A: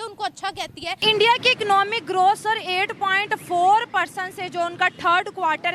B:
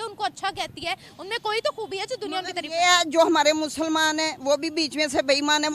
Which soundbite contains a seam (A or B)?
A